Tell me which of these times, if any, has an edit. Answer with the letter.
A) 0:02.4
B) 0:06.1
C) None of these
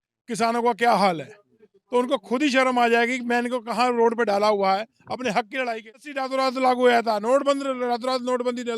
B